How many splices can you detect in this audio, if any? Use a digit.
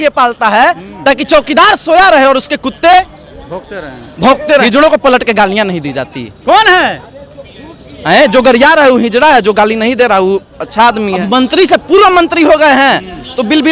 2